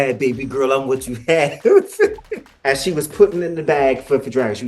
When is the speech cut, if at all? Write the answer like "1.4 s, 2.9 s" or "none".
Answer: 2.5 s